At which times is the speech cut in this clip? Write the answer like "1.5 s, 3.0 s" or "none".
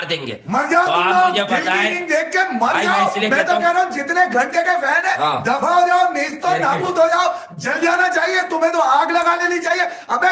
none